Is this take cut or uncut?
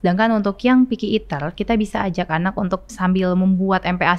cut